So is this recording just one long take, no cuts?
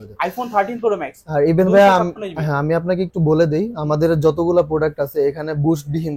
yes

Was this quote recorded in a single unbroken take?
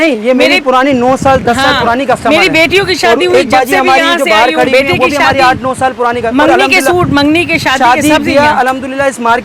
yes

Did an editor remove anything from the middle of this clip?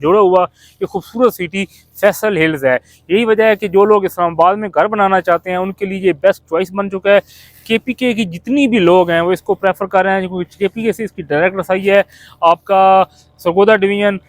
no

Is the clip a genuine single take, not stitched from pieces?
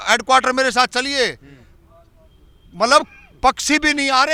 yes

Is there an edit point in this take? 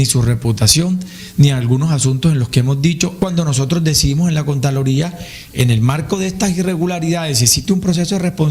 yes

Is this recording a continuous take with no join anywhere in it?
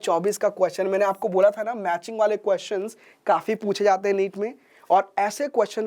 yes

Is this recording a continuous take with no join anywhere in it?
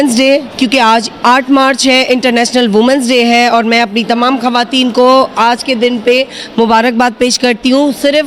yes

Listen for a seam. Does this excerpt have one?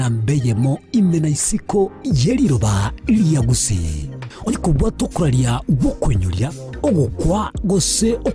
yes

